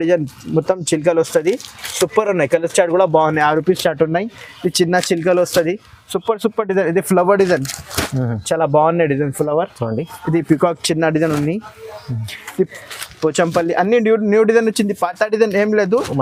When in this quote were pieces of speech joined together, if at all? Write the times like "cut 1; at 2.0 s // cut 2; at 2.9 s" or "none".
none